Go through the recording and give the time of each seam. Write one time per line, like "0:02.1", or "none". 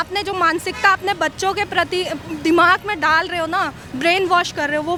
none